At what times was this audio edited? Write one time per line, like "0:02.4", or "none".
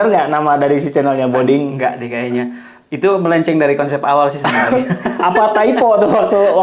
none